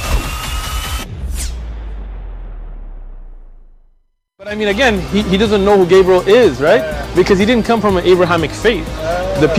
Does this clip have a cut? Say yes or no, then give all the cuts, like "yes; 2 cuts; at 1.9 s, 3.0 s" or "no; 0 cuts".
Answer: no; 0 cuts